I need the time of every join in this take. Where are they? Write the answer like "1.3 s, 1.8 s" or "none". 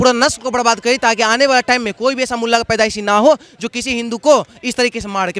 none